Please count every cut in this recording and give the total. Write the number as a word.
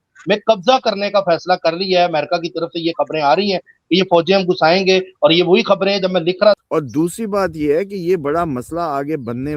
one